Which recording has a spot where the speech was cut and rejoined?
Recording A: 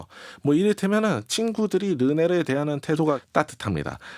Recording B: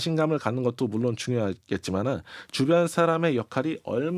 A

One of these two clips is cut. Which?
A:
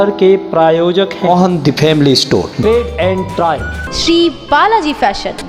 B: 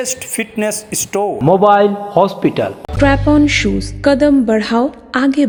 A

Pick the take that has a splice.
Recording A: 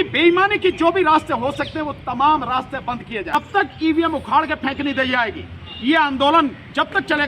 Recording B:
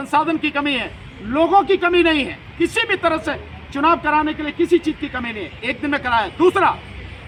A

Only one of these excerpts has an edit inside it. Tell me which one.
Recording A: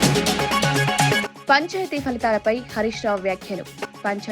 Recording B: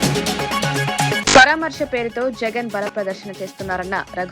A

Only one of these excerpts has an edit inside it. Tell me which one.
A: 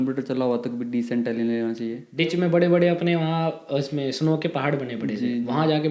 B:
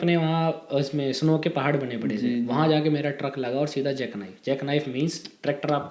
A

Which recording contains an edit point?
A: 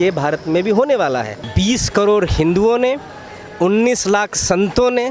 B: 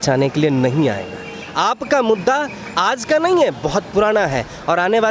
A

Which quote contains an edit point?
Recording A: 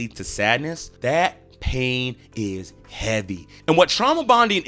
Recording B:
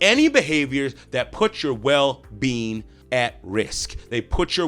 A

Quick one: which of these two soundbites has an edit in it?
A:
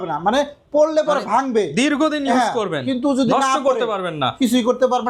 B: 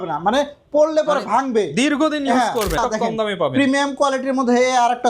B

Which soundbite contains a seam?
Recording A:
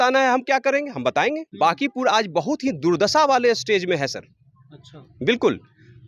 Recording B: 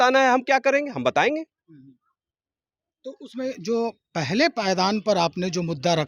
A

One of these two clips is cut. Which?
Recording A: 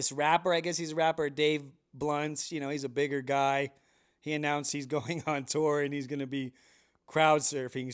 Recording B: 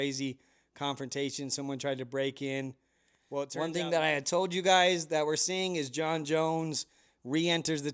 B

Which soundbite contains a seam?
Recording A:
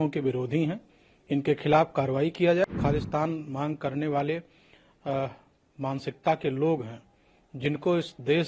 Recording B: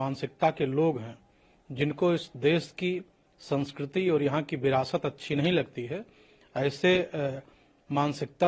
A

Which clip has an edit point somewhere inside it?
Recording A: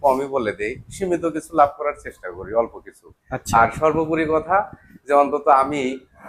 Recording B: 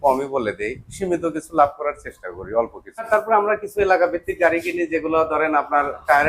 B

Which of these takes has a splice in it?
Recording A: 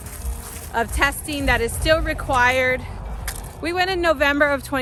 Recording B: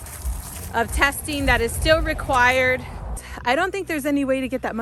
B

